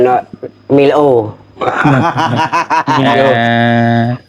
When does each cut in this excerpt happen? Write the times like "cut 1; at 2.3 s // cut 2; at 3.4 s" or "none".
cut 1; at 3.4 s